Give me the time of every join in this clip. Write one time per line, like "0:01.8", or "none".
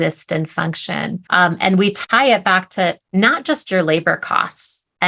0:01.2
0:02.0